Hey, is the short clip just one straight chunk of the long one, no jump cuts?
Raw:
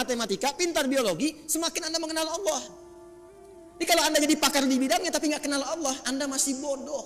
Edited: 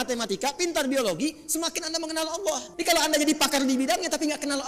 no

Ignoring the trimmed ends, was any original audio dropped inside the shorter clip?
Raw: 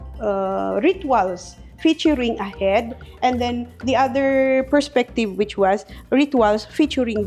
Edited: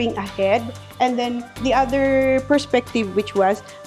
no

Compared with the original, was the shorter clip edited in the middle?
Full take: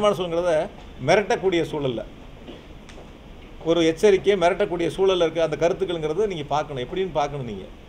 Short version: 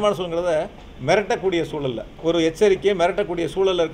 yes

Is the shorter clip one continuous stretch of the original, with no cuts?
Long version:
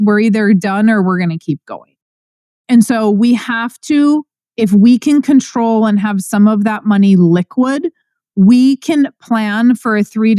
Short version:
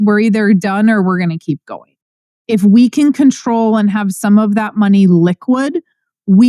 no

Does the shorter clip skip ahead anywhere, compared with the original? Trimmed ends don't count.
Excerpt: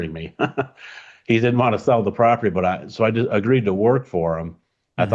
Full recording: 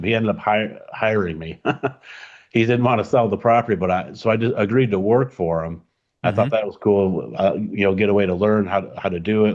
no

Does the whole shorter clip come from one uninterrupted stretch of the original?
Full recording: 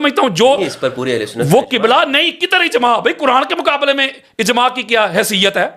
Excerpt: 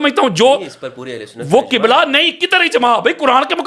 yes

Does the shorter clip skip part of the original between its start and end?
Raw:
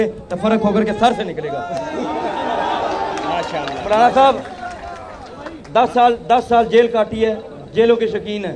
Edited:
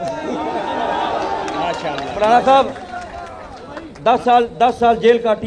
no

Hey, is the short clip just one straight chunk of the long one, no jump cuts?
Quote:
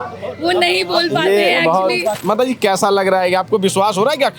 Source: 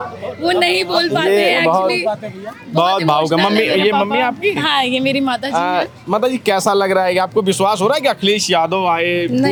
no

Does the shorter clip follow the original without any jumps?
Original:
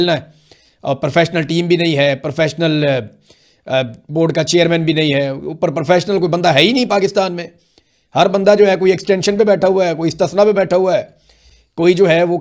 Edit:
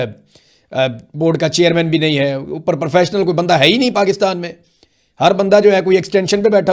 yes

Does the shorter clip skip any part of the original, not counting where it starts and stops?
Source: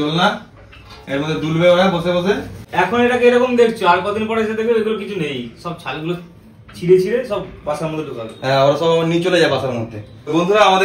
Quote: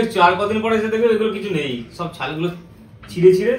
no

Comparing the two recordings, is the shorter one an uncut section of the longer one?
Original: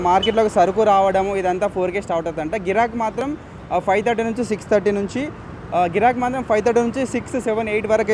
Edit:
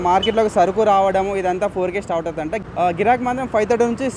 no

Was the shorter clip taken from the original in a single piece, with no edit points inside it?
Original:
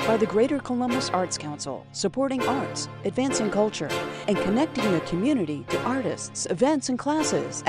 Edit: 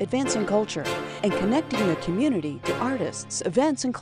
yes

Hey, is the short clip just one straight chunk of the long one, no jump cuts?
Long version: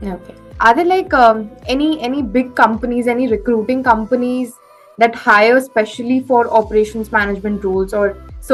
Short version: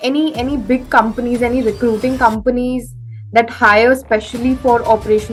yes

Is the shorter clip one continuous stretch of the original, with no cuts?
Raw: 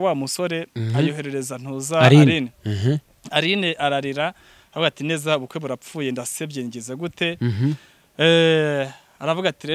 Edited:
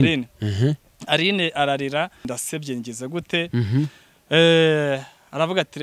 no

